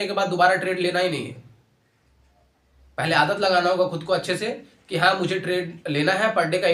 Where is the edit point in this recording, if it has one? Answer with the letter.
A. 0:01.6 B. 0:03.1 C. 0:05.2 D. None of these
D